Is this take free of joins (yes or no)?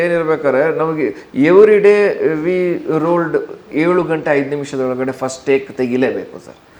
yes